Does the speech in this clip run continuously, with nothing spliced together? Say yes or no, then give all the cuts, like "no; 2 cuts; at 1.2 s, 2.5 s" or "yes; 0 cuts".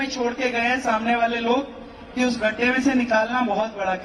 yes; 0 cuts